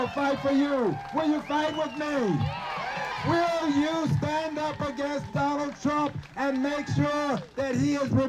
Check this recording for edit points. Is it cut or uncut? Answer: cut